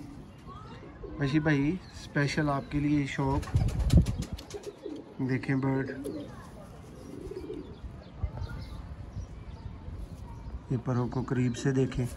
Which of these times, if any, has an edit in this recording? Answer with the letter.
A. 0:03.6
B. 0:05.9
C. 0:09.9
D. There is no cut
D